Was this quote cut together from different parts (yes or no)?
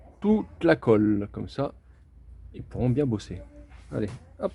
no